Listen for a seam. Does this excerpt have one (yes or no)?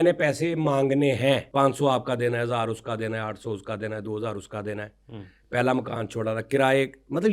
yes